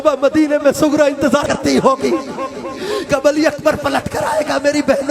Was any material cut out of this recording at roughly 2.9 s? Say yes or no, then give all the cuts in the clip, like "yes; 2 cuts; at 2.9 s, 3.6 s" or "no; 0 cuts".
no; 1 cut; at 1.4 s